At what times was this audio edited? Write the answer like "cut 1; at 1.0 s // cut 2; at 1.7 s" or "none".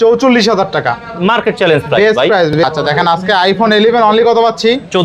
cut 1; at 2.6 s